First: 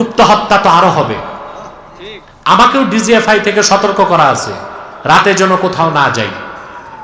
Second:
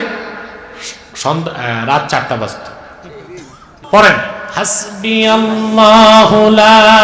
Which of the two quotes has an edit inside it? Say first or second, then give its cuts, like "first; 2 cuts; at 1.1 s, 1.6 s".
second; 1 cut; at 3.7 s